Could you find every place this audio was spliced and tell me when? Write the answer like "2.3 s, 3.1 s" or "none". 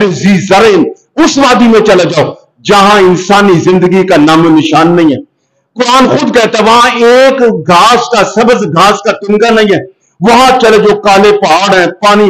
none